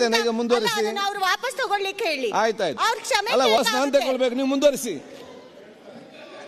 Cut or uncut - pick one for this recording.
cut